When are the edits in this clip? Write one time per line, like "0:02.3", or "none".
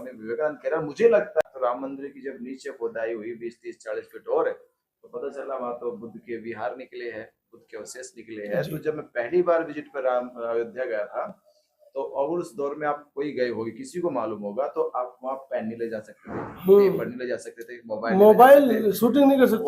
0:01.4